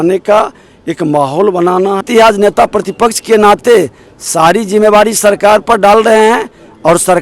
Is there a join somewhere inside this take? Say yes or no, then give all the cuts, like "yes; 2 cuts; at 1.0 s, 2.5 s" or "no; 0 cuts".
yes; 1 cut; at 2.0 s